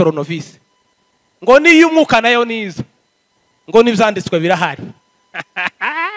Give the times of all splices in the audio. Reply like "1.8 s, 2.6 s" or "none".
none